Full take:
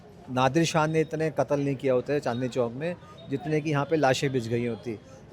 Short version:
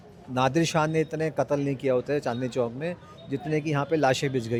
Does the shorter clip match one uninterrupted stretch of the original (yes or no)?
yes